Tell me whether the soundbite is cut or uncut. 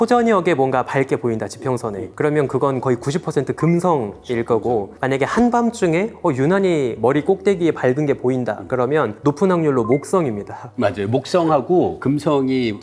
uncut